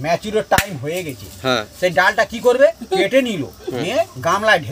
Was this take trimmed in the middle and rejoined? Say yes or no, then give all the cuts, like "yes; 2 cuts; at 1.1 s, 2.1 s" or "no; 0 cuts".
no; 0 cuts